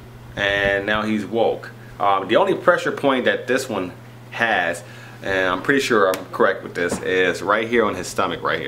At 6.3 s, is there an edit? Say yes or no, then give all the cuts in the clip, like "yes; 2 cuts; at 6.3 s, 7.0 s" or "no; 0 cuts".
yes; 1 cut; at 6.3 s